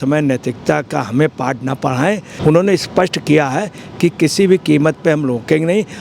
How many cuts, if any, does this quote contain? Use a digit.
1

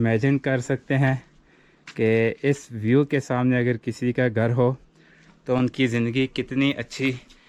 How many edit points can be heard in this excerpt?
0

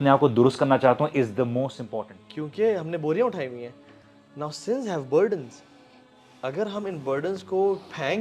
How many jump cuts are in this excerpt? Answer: 1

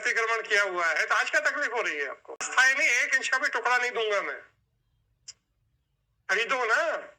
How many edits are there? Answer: 1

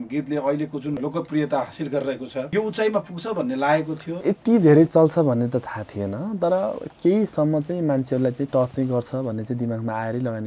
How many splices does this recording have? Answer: 3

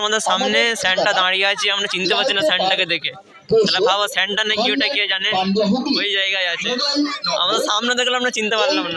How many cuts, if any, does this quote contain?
0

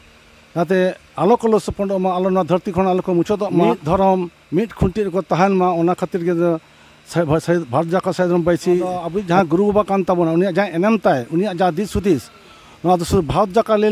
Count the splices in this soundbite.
2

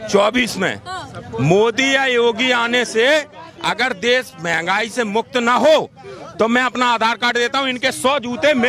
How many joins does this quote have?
0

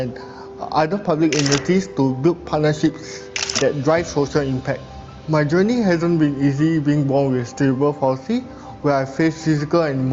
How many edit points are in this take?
0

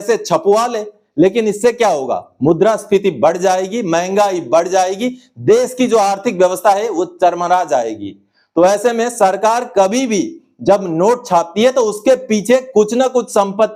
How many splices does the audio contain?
0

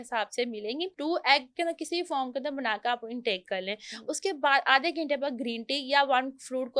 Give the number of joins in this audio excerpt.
1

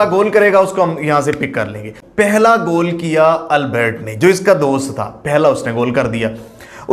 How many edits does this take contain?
1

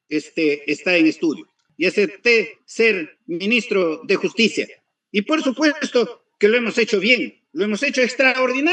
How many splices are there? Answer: 1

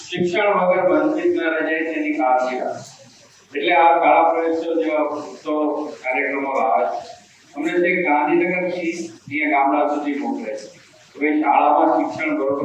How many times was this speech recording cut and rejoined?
0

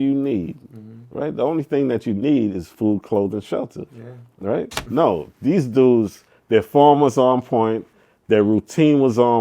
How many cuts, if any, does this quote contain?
1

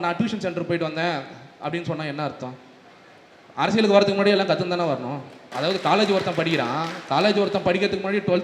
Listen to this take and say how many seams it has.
1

